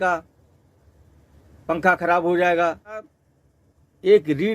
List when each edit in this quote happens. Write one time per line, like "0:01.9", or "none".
0:03.1